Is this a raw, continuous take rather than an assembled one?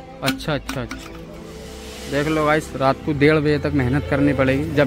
yes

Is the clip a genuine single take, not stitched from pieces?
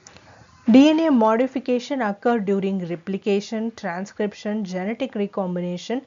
no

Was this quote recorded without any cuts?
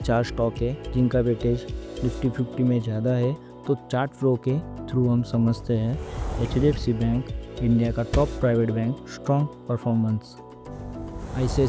yes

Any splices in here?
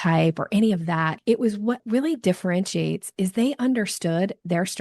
yes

